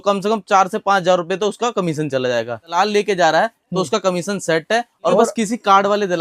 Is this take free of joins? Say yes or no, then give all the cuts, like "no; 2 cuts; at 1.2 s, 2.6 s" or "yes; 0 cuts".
no; 2 cuts; at 2.8 s, 5.1 s